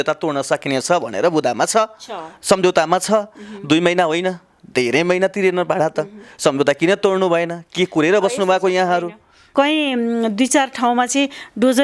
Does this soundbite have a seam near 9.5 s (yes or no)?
yes